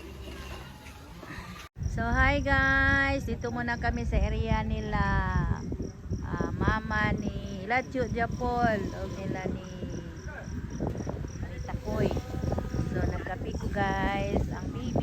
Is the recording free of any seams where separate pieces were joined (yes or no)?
no